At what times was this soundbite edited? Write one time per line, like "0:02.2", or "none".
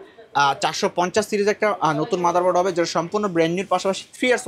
none